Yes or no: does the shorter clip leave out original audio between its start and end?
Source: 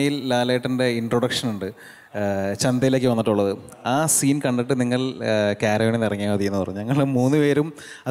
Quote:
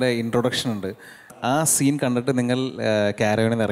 yes